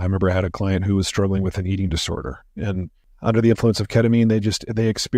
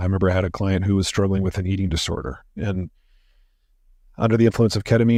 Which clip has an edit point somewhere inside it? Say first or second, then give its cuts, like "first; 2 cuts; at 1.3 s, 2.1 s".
first; 1 cut; at 3.0 s